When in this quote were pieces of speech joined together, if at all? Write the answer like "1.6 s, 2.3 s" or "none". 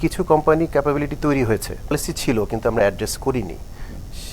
1.9 s